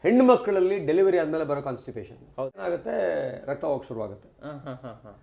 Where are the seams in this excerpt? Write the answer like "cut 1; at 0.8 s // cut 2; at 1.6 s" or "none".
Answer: cut 1; at 2.6 s